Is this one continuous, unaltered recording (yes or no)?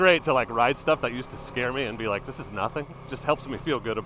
no